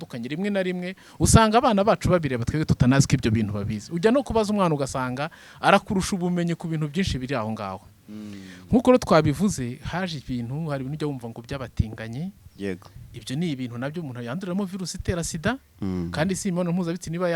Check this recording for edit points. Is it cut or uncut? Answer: uncut